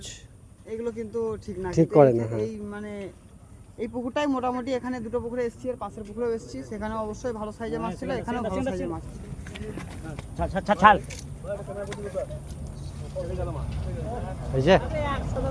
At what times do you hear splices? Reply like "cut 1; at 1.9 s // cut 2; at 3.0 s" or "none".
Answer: none